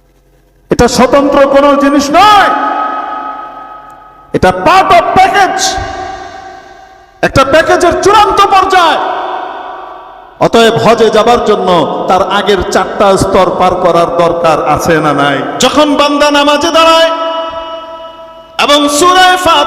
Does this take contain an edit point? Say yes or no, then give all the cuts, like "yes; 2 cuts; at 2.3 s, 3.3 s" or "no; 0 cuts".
yes; 1 cut; at 15.5 s